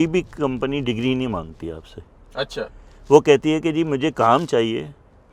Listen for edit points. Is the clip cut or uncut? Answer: uncut